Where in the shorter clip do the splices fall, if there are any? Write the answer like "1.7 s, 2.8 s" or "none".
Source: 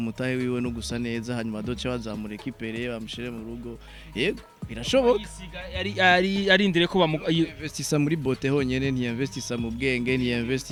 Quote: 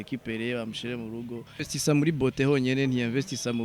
1.6 s